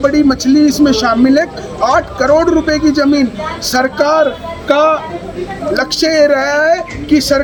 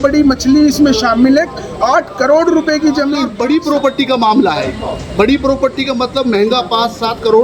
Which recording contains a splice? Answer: second; 1 cut; at 3.3 s

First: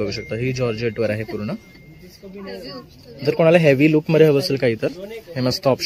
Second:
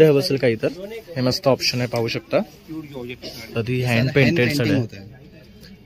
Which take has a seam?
second; 1 cut; at 3.5 s

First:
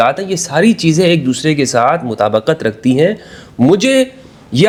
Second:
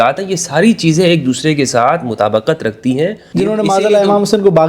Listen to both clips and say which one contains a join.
second; 1 cut; at 3.2 s

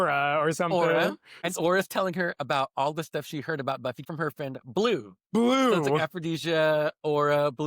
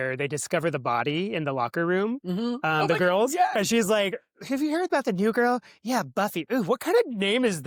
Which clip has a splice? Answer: first; 3 cuts; at 1.5 s, 2.4 s, 4.0 s

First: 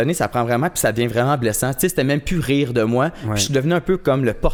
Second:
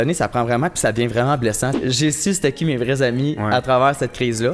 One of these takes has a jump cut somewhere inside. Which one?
second; 1 cut; at 1.7 s

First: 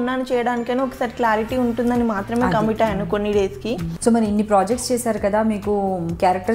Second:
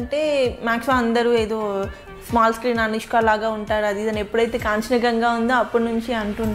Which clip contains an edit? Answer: first; 1 cut; at 3.9 s

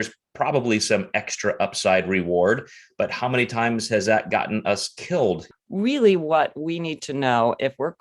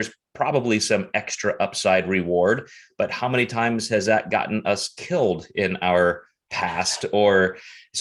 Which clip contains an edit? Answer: first; 1 cut; at 5.5 s

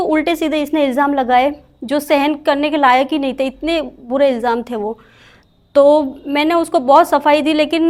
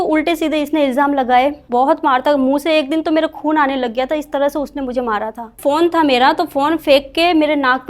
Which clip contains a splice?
second; 2 cuts; at 1.6 s, 5.6 s

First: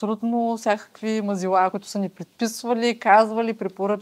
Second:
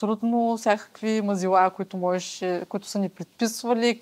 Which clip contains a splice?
first; 1 cut; at 1.7 s

